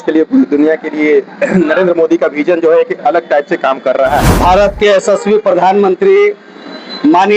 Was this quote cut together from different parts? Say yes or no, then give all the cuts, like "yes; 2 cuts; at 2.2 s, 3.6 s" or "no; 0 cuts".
yes; 1 cut; at 4.3 s